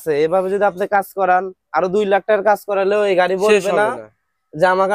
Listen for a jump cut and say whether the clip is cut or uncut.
uncut